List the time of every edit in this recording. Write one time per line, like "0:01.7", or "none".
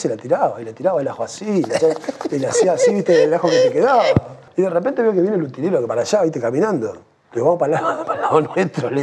0:04.4

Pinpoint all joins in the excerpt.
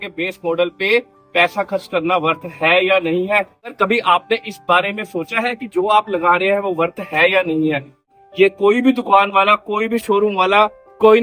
0:03.8
0:08.0

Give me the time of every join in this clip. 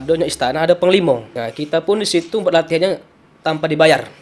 0:01.4

